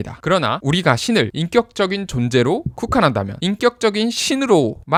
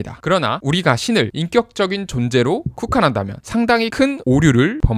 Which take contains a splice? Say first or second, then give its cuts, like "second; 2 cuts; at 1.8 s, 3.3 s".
second; 1 cut; at 3.4 s